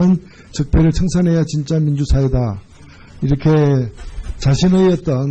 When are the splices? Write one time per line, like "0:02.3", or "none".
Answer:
0:04.0